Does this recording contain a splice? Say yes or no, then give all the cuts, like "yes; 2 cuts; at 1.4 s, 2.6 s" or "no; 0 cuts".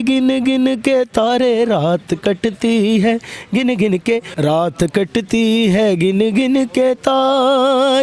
yes; 1 cut; at 4.3 s